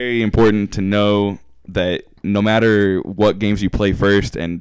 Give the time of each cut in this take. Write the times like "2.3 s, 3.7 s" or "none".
none